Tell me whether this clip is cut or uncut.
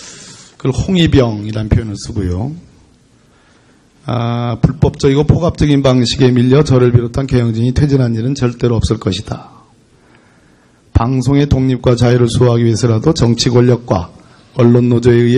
cut